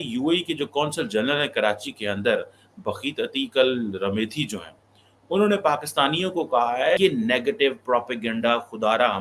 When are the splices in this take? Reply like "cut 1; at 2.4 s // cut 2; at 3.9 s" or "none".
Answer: cut 1; at 7.0 s